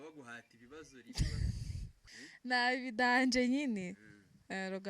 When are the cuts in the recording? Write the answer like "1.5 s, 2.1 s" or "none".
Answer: 1.9 s